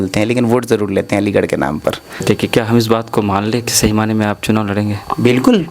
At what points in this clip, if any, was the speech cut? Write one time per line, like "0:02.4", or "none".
0:02.2